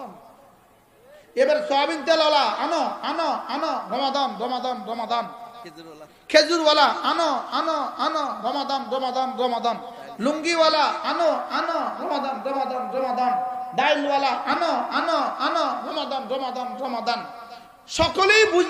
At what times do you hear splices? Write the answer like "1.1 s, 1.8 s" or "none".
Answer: none